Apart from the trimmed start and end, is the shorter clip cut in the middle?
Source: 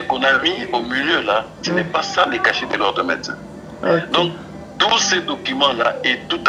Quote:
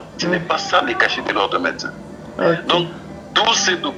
no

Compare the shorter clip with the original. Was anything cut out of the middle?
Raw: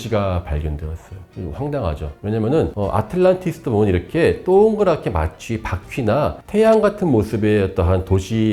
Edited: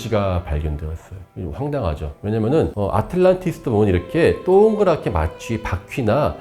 no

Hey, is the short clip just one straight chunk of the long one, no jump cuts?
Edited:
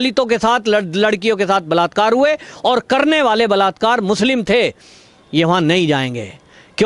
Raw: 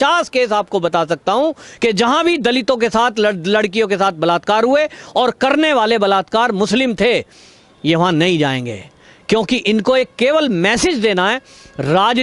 yes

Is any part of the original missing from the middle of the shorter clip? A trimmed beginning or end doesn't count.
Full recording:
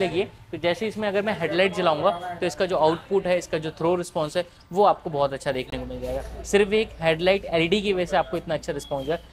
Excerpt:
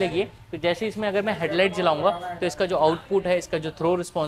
no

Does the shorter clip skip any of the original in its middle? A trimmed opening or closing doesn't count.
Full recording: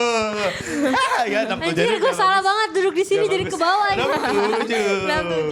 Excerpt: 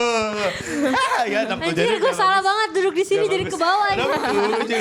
no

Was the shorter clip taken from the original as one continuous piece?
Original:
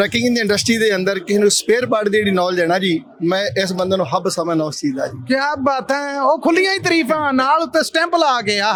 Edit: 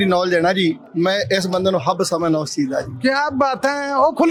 yes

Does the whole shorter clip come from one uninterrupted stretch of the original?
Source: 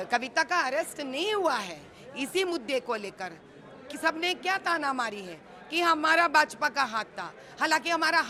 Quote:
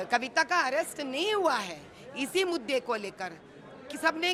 yes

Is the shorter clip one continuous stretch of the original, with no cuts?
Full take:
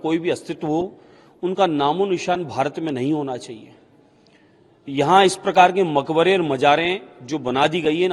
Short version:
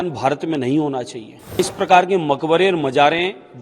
no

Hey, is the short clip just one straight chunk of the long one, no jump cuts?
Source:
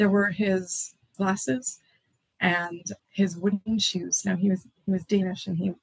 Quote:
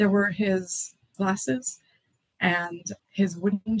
yes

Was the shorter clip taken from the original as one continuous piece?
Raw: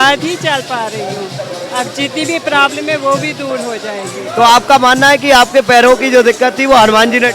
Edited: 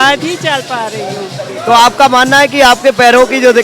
no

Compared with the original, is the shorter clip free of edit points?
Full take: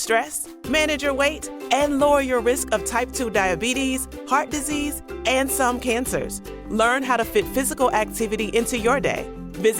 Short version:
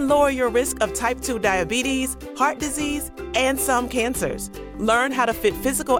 yes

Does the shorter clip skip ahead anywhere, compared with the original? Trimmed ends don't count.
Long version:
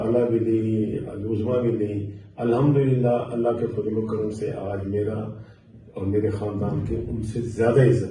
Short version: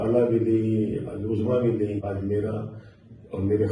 yes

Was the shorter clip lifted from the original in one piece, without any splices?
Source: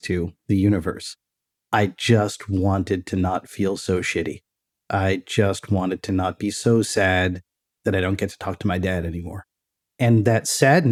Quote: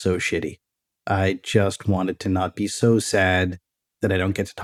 yes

